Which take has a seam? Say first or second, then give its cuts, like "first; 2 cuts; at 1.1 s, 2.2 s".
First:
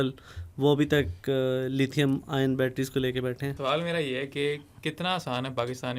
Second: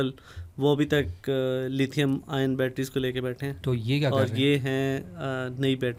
first; 1 cut; at 3.5 s